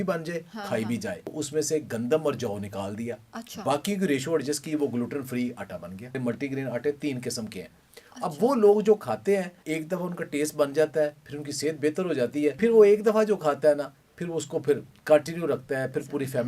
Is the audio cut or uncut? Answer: cut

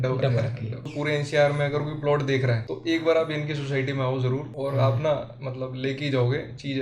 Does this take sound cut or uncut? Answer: cut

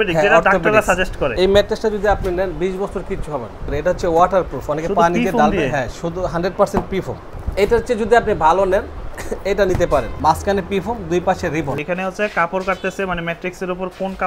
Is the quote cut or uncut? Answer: cut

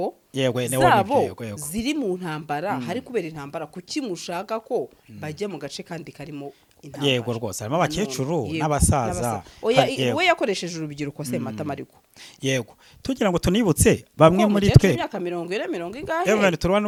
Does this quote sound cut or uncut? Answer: uncut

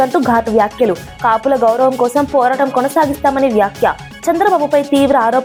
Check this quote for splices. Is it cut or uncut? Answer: uncut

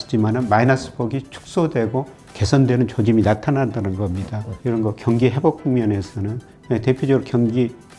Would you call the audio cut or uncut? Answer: cut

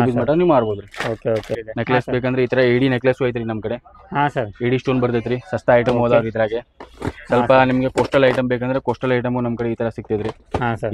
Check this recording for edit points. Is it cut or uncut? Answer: cut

